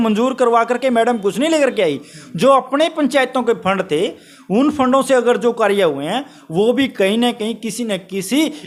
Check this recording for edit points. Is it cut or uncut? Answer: uncut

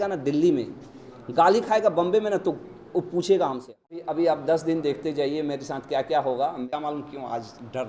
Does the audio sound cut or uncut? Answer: cut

